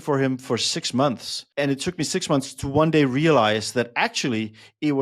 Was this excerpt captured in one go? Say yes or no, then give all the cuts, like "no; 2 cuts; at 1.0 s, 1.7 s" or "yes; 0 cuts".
no; 1 cut; at 1.3 s